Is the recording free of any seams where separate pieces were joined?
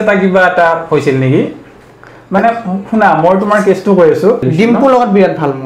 no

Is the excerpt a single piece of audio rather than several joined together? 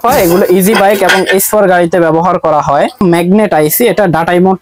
no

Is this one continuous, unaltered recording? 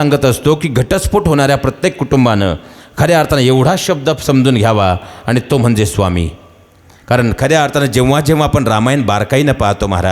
yes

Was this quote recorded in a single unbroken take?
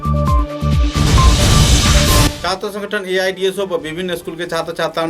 no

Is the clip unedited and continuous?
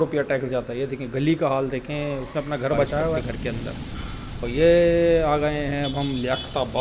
no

